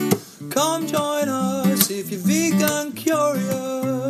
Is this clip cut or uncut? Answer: uncut